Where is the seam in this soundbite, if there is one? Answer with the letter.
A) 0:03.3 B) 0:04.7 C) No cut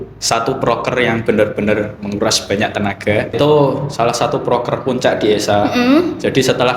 A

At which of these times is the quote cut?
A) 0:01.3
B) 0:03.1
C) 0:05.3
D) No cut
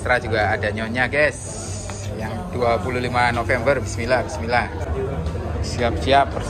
C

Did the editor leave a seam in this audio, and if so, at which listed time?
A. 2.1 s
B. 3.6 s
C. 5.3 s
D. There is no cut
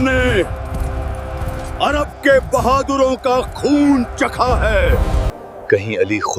C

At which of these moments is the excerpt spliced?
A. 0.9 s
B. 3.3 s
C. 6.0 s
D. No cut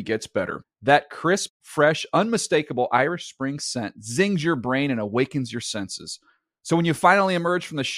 D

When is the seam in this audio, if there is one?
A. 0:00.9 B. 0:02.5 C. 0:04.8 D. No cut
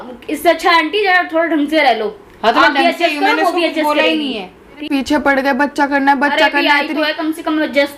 C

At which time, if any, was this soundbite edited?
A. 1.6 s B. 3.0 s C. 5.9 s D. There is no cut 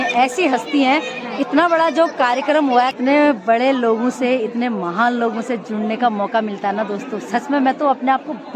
B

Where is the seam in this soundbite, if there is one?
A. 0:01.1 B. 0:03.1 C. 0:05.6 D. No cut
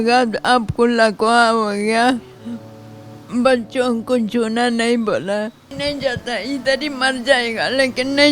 C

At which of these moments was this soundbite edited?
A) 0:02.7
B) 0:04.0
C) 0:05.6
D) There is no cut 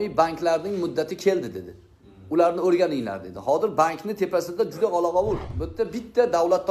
C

